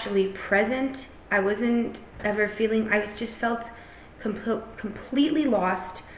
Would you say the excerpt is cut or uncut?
uncut